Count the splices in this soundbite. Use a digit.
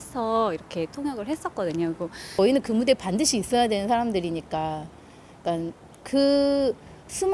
1